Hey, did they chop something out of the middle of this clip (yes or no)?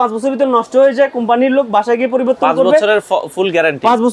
no